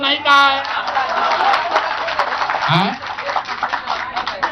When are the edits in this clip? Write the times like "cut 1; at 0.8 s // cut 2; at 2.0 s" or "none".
none